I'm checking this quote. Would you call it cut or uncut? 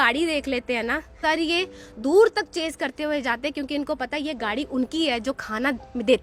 cut